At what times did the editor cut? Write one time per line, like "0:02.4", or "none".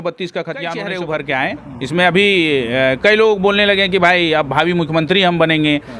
0:01.0